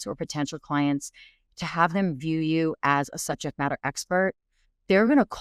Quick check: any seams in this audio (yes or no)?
no